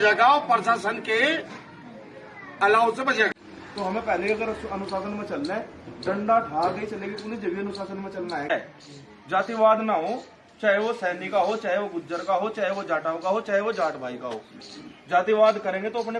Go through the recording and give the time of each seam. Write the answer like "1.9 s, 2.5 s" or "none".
3.3 s, 8.5 s